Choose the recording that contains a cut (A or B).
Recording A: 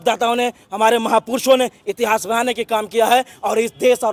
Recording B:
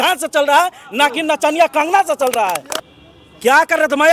B